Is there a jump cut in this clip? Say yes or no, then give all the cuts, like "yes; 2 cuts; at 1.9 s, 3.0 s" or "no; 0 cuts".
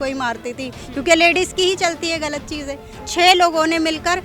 yes; 1 cut; at 3.1 s